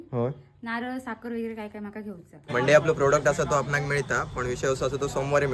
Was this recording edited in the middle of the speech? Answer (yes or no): yes